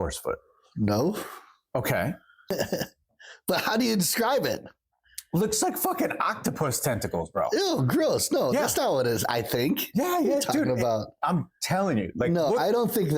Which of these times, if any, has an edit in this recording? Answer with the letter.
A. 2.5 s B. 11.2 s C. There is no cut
A